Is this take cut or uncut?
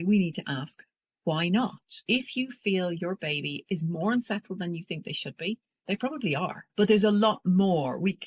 cut